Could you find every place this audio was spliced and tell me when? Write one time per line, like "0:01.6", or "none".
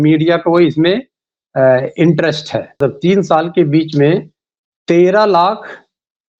0:02.8